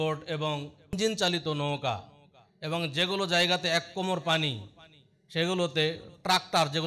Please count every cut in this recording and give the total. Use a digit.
1